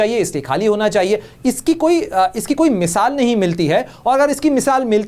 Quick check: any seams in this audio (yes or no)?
no